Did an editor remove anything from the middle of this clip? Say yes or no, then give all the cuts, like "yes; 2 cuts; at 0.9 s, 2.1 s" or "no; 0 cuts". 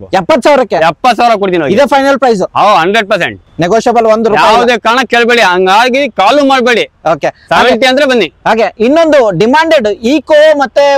no; 0 cuts